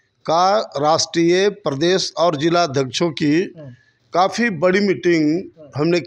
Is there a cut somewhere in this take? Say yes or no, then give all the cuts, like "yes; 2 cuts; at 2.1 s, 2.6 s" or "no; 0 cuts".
no; 0 cuts